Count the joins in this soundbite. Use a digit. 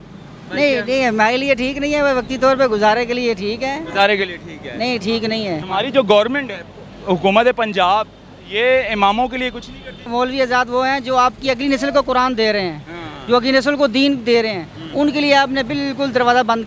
2